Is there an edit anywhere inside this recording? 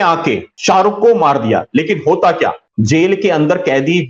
no; 0 cuts

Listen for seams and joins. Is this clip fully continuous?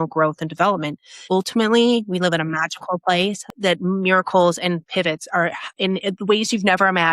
no; 2 cuts; at 1.2 s, 3.5 s

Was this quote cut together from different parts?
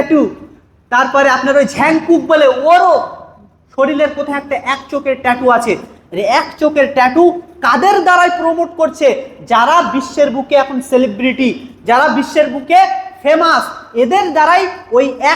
no; 0 cuts

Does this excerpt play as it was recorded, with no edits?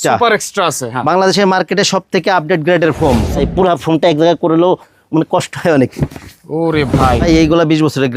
no; 2 cuts; at 3.4 s, 7.2 s

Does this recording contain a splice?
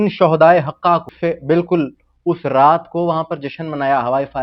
yes; 1 cut; at 1.1 s

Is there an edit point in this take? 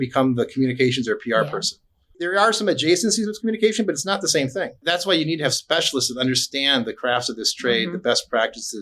yes; 2 cuts; at 2.2 s, 4.8 s

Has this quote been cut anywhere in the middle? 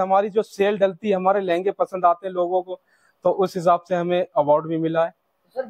no; 0 cuts

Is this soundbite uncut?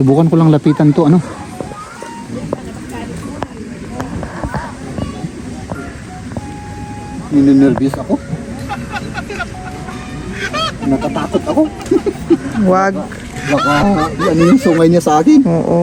yes; 0 cuts

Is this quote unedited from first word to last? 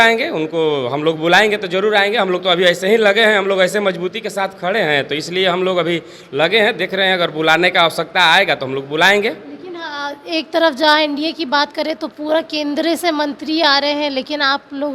yes; 0 cuts

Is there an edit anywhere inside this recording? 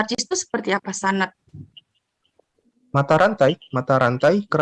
no; 0 cuts

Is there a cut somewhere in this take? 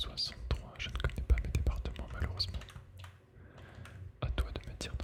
no; 0 cuts

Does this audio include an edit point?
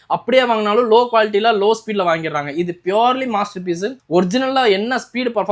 no; 0 cuts

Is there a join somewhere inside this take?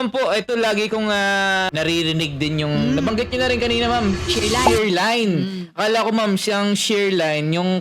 yes; 1 cut; at 1.7 s

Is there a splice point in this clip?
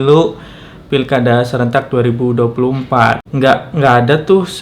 yes; 1 cut; at 3.2 s

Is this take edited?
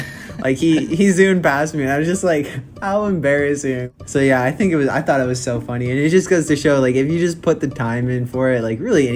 yes; 1 cut; at 3.9 s

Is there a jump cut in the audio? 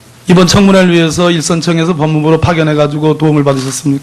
yes; 1 cut; at 2.0 s

